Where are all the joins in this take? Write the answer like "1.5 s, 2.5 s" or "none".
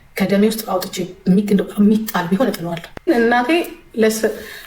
2.9 s